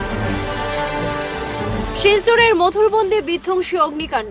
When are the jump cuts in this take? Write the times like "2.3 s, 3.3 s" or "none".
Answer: 1.5 s